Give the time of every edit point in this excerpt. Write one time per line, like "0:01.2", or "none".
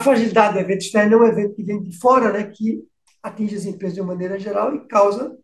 none